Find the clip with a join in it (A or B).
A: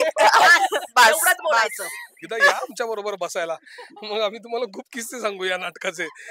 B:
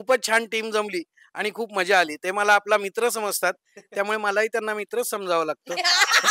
A